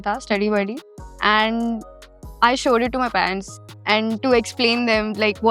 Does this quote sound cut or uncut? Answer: cut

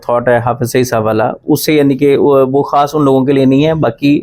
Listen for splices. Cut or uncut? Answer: uncut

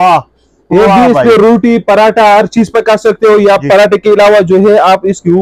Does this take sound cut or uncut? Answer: uncut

